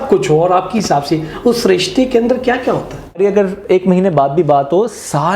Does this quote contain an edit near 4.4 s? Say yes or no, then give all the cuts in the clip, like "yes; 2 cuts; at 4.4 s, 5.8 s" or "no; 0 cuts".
no; 1 cut; at 3.2 s